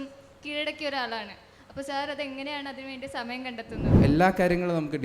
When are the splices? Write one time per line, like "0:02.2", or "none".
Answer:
0:04.0